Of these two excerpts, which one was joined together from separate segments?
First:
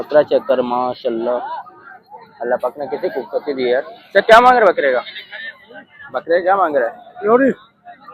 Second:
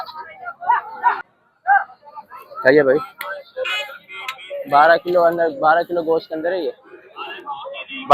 second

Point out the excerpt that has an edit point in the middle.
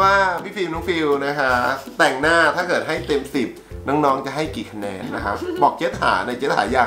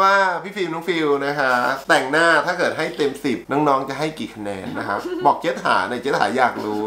second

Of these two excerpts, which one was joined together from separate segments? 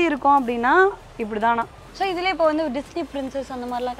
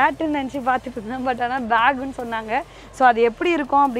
first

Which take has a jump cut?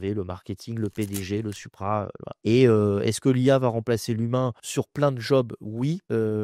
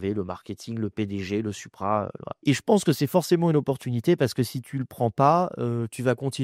first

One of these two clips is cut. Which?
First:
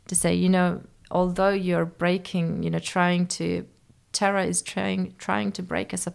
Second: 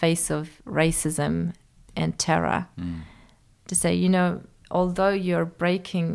second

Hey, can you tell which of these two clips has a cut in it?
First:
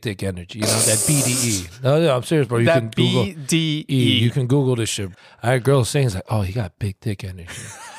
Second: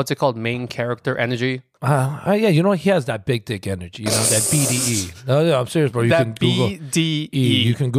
second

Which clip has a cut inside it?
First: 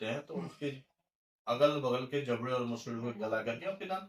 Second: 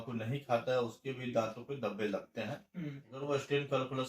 second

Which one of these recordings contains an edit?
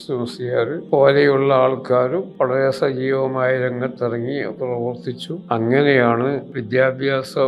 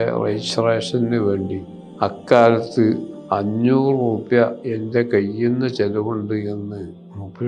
first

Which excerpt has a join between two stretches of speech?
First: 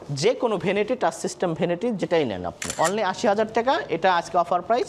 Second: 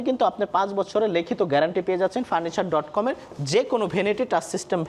first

